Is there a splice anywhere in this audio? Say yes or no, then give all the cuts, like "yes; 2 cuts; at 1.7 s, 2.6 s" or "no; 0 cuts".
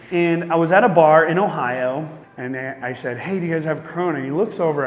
yes; 1 cut; at 2.2 s